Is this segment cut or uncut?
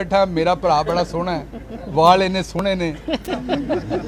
uncut